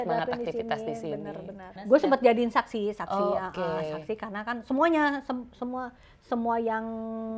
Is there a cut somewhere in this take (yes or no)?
yes